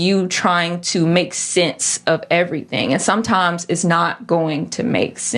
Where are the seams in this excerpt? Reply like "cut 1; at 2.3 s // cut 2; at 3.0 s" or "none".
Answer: none